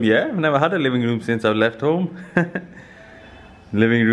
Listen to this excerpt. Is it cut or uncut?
uncut